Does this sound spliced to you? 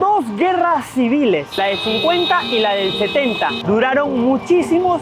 no; 0 cuts

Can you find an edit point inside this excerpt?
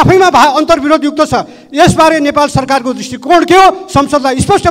no; 0 cuts

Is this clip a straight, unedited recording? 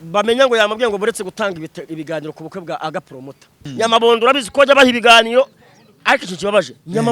no; 1 cut; at 3.6 s

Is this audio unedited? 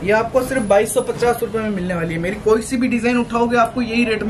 yes; 0 cuts

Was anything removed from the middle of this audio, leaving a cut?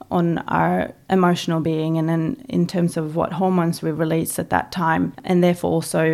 yes; 1 cut; at 5.2 s

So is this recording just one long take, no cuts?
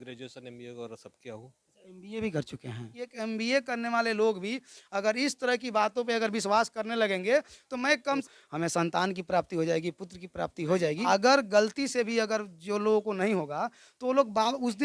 no; 3 cuts; at 3.0 s, 8.3 s, 11.1 s

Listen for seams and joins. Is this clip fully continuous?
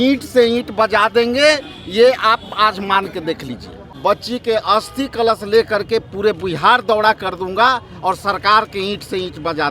no; 1 cut; at 4.0 s

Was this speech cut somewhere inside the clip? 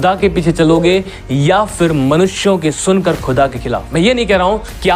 yes; 1 cut; at 3.9 s

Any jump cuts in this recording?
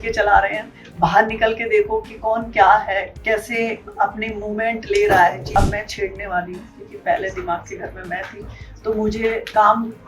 yes; 1 cut; at 5.6 s

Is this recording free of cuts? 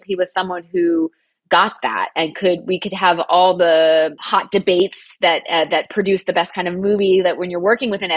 no; 1 cut; at 4.2 s

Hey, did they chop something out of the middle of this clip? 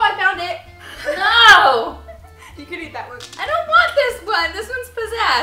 no; 0 cuts

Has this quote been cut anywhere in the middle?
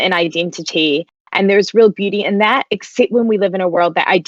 no; 0 cuts

